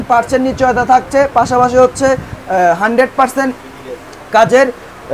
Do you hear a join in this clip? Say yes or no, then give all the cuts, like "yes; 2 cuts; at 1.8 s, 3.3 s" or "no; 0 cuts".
no; 0 cuts